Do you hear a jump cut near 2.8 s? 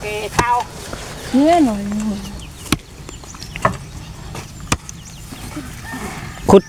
no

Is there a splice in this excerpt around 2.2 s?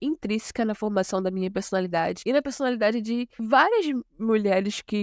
yes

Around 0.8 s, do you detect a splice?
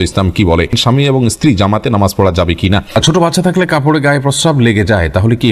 yes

